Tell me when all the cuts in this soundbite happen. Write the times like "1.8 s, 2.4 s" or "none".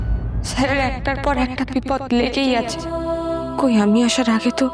none